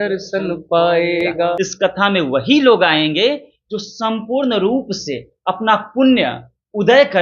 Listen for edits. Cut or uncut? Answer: cut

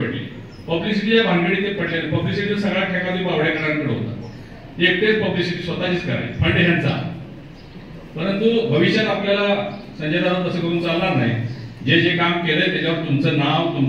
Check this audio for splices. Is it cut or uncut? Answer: uncut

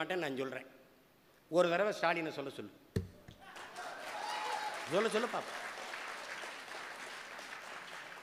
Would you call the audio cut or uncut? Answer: uncut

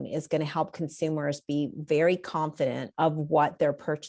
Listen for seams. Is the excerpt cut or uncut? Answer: cut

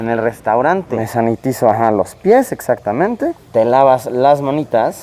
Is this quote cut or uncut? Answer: cut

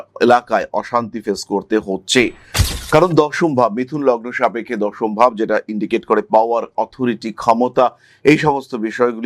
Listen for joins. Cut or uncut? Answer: uncut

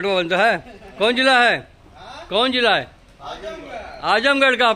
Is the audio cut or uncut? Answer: uncut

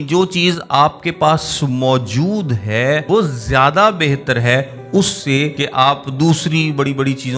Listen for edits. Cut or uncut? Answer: cut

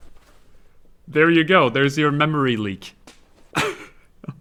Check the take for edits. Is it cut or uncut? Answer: uncut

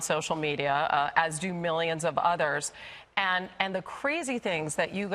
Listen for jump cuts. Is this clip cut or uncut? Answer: uncut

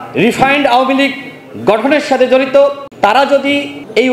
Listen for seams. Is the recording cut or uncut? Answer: cut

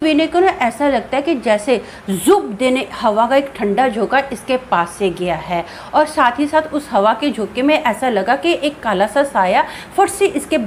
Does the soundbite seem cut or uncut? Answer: uncut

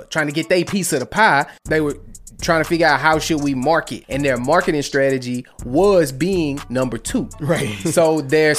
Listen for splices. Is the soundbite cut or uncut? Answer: cut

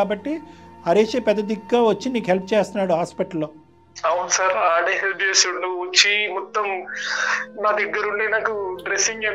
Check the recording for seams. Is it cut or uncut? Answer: uncut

